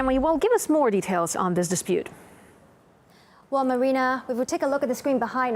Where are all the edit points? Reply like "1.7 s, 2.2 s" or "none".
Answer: 2.5 s